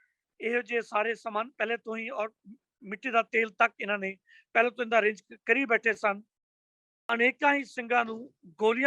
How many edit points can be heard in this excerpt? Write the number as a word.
one